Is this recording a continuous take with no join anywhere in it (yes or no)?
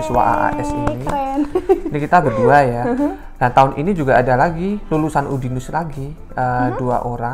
yes